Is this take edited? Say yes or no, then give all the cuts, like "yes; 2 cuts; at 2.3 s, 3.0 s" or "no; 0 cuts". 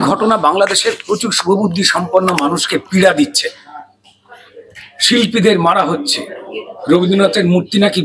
no; 0 cuts